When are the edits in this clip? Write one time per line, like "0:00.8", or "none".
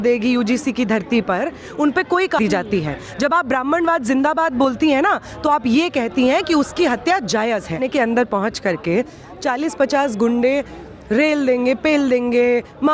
0:02.4
0:07.8

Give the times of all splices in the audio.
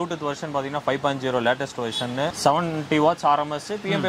0:02.3

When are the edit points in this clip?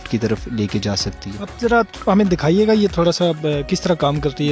none

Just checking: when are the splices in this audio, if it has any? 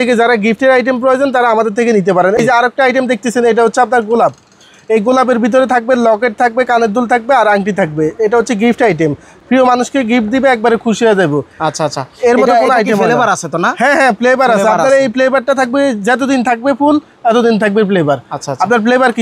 none

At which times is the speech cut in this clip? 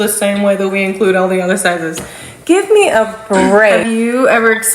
0:03.8

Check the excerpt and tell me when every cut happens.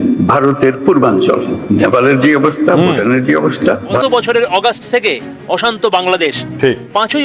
0:04.0

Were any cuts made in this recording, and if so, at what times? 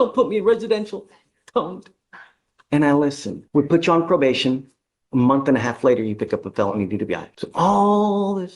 0:03.3
0:07.4

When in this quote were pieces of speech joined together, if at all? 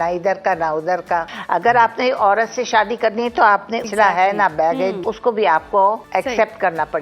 0:01.3
0:03.9
0:05.1
0:06.0

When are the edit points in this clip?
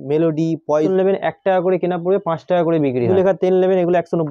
0:00.9
0:03.1

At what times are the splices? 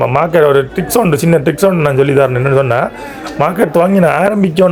none

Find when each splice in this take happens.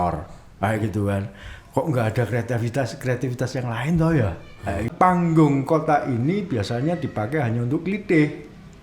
0:04.9

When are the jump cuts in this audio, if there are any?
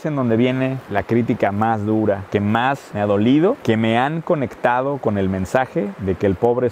none

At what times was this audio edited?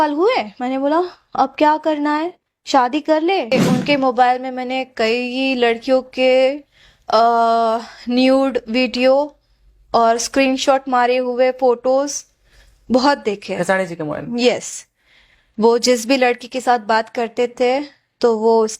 0:03.5

